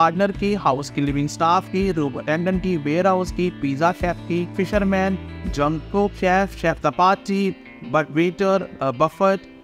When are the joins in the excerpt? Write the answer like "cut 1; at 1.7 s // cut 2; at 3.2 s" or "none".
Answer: none